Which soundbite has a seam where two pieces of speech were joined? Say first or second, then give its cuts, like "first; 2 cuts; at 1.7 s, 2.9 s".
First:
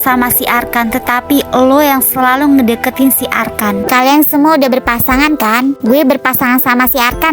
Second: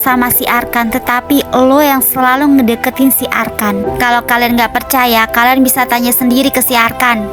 first; 1 cut; at 3.8 s